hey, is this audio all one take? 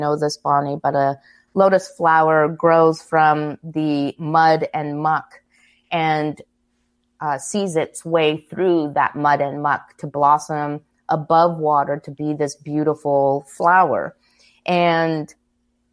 yes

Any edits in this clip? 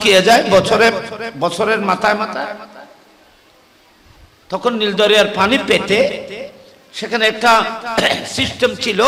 no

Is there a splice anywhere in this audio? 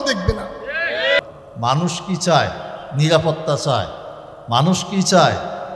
yes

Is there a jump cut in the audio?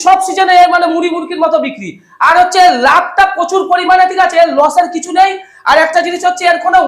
no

